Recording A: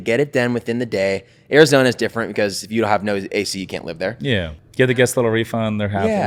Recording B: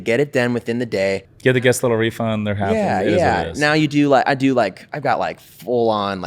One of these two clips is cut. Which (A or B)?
B